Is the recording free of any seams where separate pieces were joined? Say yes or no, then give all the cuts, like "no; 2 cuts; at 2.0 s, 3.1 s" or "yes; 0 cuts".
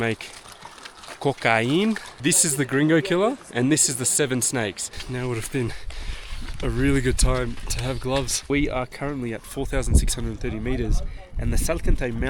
no; 3 cuts; at 2.1 s, 5.1 s, 8.5 s